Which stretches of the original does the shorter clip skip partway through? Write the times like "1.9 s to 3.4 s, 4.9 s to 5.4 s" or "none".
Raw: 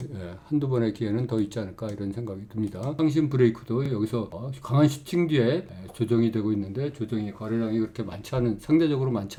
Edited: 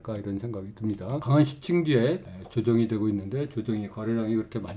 2.9 s to 4.6 s

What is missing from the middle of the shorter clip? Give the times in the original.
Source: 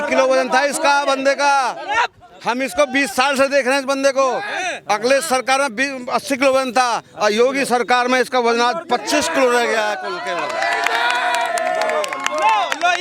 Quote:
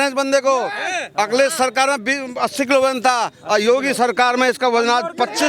none

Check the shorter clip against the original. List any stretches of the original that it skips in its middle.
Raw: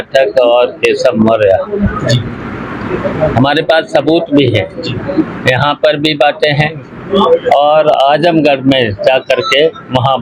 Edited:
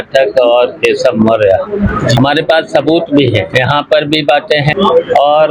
2.2 s to 3.4 s, 4.7 s to 5.4 s, 6.6 s to 7.1 s

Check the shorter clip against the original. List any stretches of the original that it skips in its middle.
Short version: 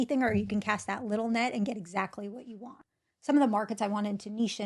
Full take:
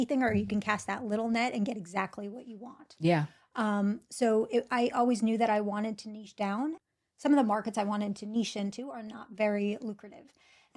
2.9 s to 6.9 s

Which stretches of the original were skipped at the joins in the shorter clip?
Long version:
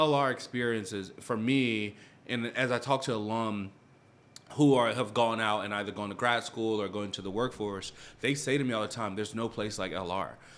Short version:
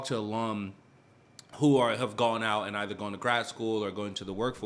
none

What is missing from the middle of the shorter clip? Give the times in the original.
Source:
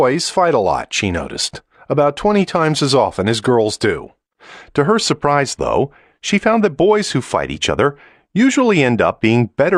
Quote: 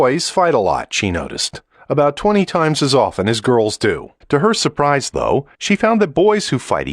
4.1 s to 4.6 s, 6.0 s to 6.2 s

